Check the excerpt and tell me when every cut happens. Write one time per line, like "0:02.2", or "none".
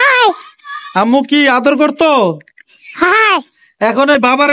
none